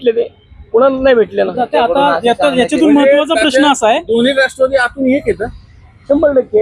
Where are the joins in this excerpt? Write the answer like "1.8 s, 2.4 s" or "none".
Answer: none

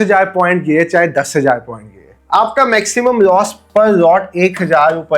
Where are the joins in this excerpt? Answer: none

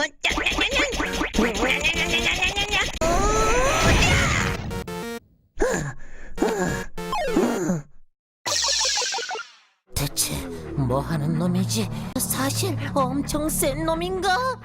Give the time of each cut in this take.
3.0 s, 4.8 s, 12.2 s

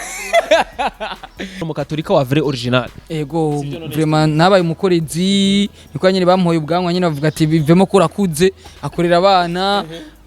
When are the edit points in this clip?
1.7 s

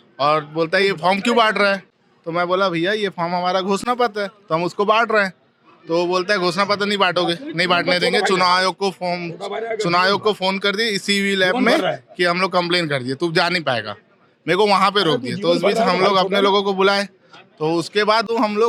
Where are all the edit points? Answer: none

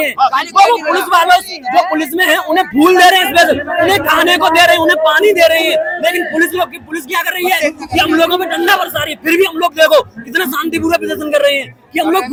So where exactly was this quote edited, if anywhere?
none

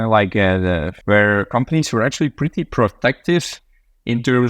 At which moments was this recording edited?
0.9 s

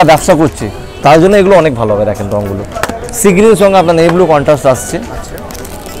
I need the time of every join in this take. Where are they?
none

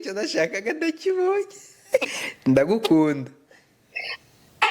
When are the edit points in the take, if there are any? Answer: 2.2 s

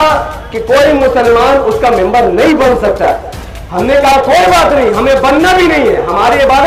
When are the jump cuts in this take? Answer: none

